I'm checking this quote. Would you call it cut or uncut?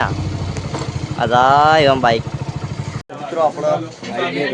cut